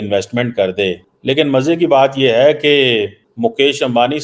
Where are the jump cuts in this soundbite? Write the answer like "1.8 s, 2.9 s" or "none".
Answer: 1.1 s, 3.2 s

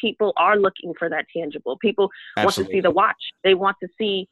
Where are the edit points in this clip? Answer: 3.3 s

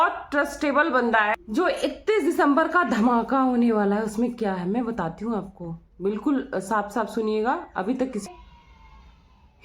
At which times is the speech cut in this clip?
1.3 s, 8.2 s

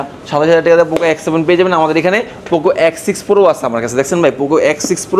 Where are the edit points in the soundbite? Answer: none

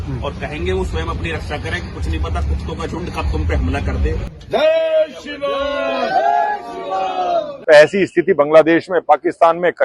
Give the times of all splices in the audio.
4.3 s, 7.5 s

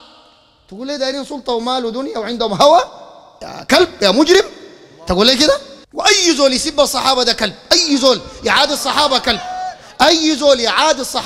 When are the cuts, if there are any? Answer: 5.8 s

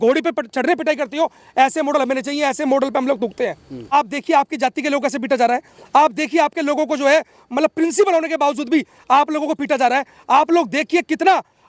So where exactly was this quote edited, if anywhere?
3.7 s

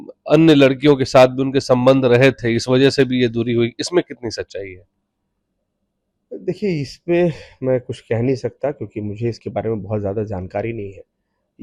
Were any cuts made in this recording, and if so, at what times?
none

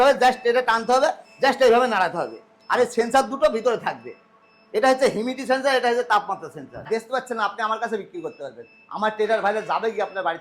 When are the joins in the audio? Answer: 6.9 s

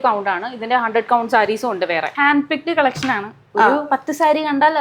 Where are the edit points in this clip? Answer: 2.1 s

